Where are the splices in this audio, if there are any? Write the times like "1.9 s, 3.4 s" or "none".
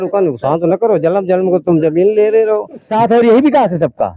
2.9 s